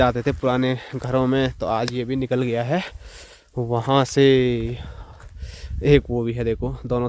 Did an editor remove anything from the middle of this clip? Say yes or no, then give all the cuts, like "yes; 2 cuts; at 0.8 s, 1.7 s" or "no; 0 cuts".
no; 0 cuts